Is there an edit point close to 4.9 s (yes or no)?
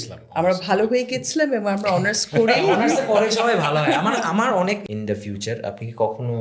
yes